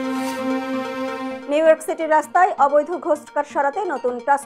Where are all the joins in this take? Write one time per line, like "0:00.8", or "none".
0:01.3